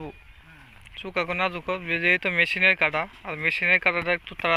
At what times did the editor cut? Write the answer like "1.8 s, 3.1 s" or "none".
none